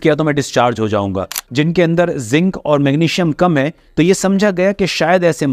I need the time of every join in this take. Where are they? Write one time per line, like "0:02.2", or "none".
0:01.4